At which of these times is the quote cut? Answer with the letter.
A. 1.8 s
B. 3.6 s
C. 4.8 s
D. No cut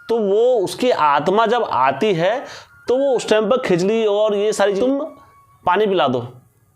C